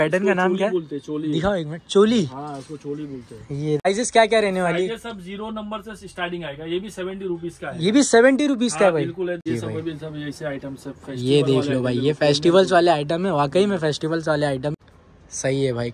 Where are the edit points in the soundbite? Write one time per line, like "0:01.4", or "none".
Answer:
0:03.9
0:09.5
0:14.7